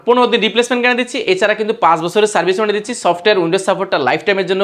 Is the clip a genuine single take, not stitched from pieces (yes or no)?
yes